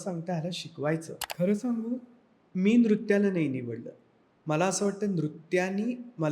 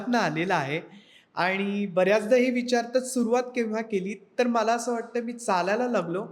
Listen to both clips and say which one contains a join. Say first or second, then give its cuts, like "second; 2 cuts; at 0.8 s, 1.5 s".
first; 1 cut; at 1.2 s